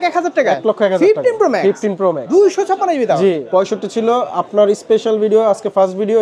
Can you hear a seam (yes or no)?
yes